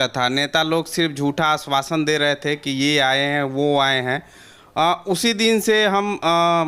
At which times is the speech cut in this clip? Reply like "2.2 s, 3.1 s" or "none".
none